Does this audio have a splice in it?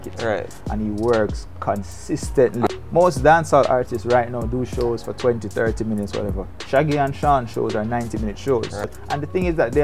yes; 2 cuts; at 2.7 s, 9.0 s

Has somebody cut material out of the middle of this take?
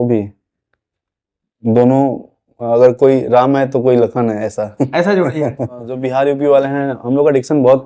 yes; 1 cut; at 5.9 s

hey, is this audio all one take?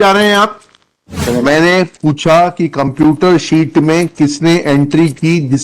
no; 1 cut; at 1.2 s

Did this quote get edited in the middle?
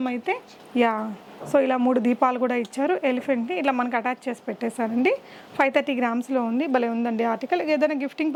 no; 0 cuts

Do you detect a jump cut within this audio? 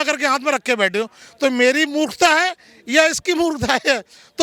no; 0 cuts

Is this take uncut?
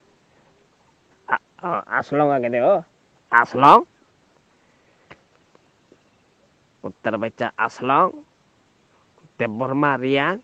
yes; 0 cuts

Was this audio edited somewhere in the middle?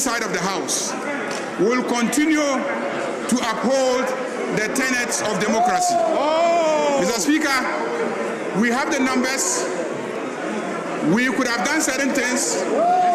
no; 0 cuts

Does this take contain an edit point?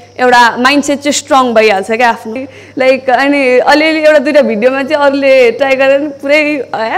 yes; 1 cut; at 2.2 s

